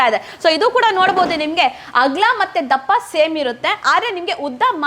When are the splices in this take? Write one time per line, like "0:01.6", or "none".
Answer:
none